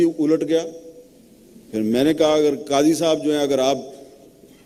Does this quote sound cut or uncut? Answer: uncut